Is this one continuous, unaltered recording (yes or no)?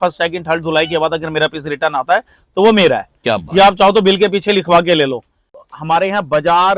no